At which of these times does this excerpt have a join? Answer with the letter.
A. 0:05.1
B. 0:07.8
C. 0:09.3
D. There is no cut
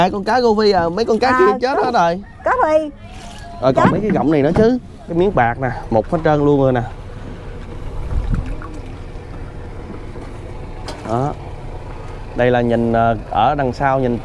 A